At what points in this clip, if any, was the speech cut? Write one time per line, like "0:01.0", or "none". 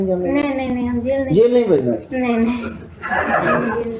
none